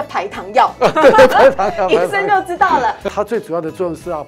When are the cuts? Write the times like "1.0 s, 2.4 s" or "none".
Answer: 3.1 s